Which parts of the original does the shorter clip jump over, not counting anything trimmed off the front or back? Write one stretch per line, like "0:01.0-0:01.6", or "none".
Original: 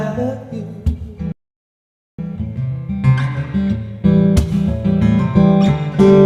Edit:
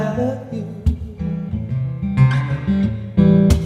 0:01.3-0:02.2